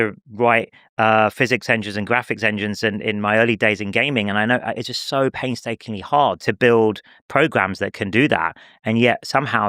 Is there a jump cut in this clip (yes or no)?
no